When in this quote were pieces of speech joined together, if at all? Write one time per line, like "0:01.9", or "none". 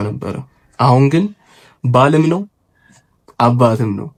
none